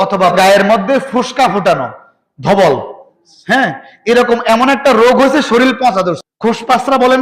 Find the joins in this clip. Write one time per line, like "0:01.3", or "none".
0:06.3